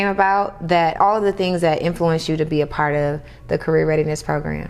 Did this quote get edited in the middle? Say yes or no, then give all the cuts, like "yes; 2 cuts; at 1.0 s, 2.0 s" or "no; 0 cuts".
yes; 1 cut; at 0.9 s